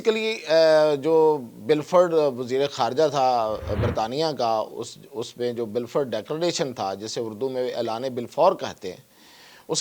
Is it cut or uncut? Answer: uncut